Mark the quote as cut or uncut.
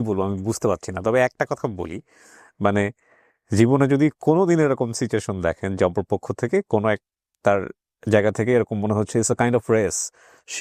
uncut